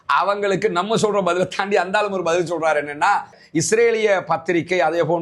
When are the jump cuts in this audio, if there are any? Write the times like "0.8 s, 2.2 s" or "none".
3.4 s